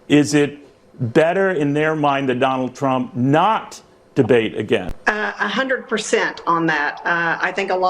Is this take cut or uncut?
cut